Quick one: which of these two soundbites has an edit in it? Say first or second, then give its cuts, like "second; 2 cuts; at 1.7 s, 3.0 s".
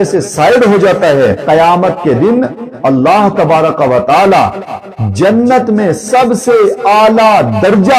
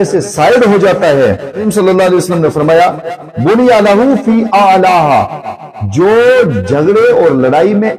first; 1 cut; at 1.4 s